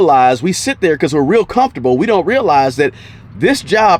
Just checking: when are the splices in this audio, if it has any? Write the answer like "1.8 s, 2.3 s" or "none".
none